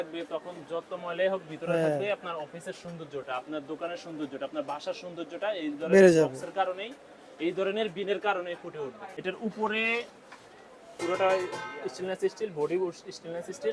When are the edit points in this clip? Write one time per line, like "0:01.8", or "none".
0:09.1

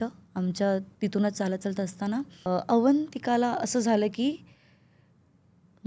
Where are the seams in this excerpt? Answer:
0:02.5

